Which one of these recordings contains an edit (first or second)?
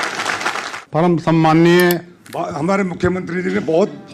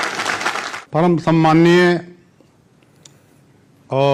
first